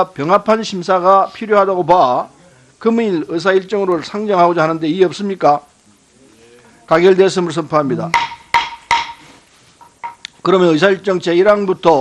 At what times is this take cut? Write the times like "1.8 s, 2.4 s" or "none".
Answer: 2.4 s